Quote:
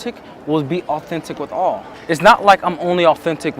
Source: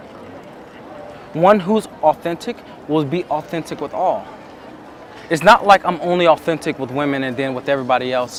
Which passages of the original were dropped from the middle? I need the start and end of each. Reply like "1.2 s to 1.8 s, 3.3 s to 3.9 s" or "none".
4.3 s to 5.1 s

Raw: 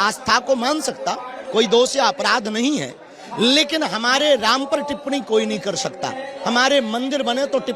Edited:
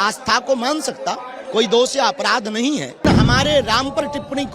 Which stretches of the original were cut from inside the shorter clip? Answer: 3.0 s to 3.8 s

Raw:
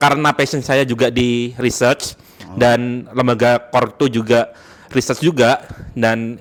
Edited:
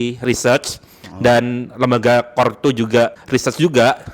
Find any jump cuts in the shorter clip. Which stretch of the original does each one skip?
4.6 s to 4.8 s

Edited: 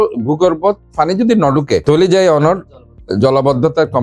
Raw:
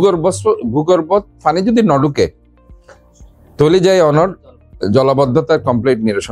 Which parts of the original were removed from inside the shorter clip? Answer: 2.3 s to 3.5 s

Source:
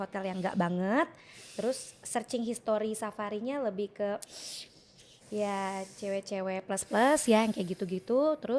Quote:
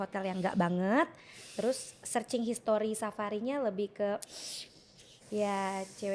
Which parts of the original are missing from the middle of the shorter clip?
none

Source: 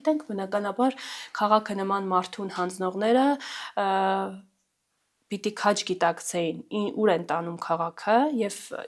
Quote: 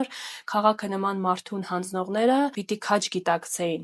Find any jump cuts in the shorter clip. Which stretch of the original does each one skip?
3.4 s to 5.3 s

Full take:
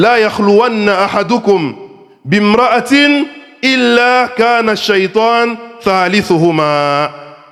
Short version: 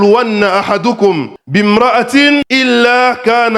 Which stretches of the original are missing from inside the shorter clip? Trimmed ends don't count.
1.8 s to 2.1 s, 3.2 s to 3.6 s

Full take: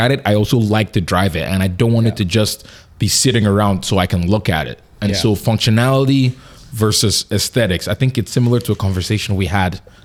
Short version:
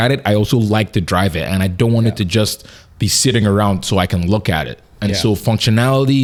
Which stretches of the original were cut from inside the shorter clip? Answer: none

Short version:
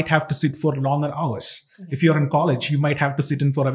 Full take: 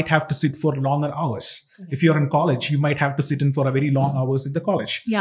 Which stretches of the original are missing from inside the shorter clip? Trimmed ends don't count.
none

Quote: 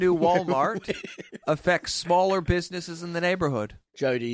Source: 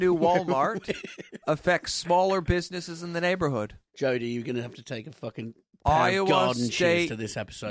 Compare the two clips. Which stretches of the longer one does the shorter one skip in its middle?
none

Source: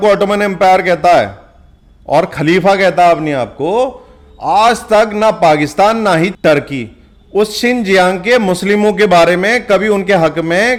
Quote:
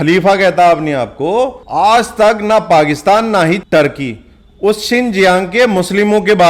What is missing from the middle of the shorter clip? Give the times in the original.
4.0 s to 4.3 s

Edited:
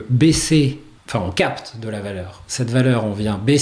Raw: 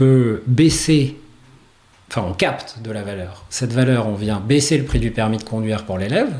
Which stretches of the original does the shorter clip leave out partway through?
1.3 s to 1.9 s

